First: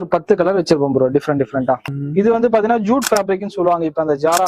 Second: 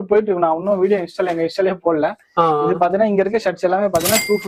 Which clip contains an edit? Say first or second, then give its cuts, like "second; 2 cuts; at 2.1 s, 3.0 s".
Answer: first; 1 cut; at 1.8 s